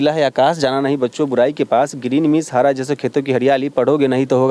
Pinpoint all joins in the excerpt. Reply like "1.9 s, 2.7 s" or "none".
none

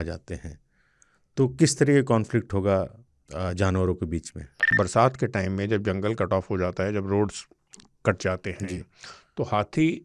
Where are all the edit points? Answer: 4.7 s

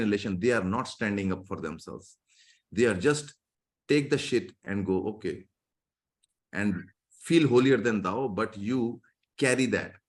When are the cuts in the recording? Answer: none

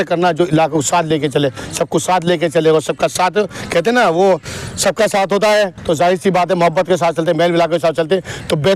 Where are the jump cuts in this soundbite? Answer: none

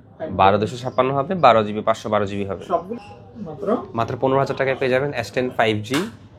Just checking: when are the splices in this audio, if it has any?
2.9 s

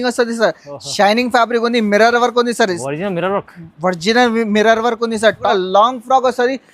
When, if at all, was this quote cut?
5.5 s

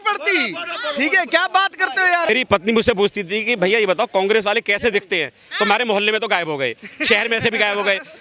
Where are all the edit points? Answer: 2.3 s

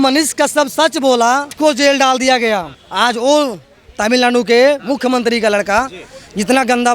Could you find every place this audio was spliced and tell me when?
1.5 s, 2.8 s

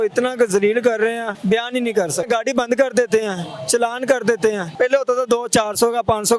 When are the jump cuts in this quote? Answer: 1.3 s, 2.3 s, 4.7 s

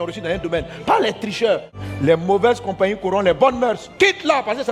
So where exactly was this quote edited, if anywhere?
1.7 s

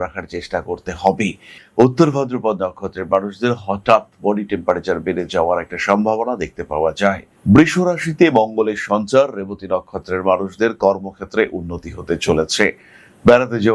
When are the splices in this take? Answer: 1.5 s, 7.3 s

